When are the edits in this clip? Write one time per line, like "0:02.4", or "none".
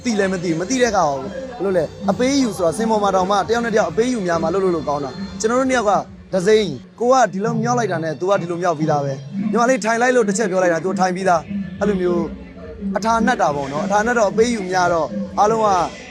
0:06.8